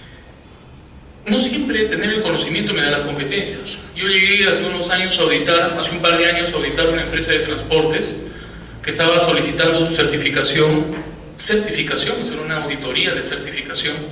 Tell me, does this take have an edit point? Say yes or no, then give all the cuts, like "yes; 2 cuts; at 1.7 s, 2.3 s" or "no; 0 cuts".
no; 0 cuts